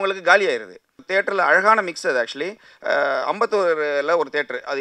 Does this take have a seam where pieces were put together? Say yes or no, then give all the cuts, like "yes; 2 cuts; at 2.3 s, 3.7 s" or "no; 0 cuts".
yes; 1 cut; at 0.9 s